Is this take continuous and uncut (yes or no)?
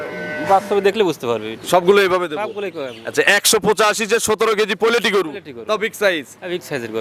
yes